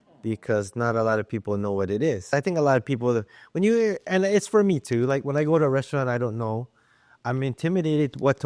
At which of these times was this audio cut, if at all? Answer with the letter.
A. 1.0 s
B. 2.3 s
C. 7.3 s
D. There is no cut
B